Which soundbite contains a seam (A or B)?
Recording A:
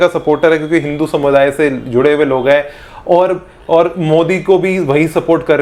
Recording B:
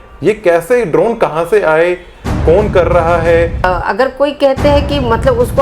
B